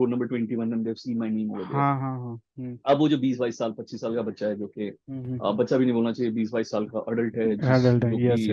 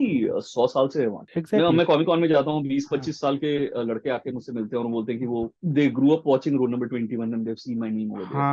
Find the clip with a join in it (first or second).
second